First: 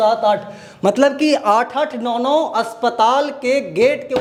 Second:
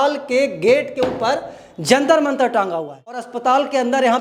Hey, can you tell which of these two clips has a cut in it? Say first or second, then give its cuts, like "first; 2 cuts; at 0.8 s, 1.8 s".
second; 1 cut; at 3.3 s